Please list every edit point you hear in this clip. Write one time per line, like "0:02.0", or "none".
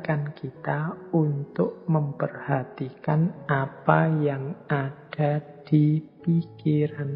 none